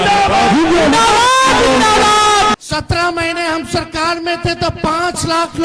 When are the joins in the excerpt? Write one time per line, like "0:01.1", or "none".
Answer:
0:02.5